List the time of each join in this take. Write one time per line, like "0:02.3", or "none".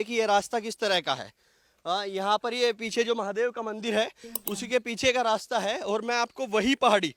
none